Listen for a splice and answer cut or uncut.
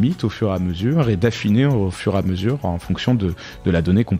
uncut